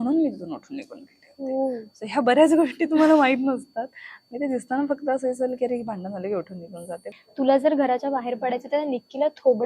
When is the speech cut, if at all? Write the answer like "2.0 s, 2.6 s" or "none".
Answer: 7.1 s